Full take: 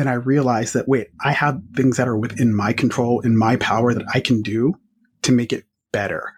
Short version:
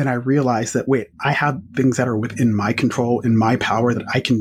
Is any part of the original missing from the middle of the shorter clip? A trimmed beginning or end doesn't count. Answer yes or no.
no